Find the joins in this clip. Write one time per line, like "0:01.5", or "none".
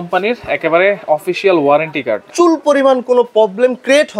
0:02.2